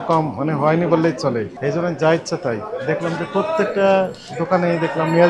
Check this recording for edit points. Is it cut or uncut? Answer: cut